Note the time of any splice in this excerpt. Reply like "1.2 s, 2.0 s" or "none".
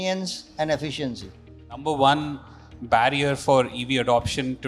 1.8 s